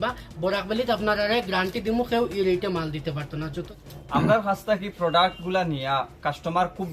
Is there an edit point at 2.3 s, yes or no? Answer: no